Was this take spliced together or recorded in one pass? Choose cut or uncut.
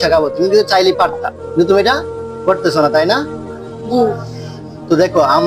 uncut